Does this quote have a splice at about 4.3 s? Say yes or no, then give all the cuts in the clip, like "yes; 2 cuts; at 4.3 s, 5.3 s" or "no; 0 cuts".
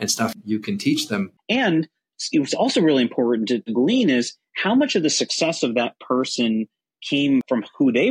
no; 1 cut; at 1.3 s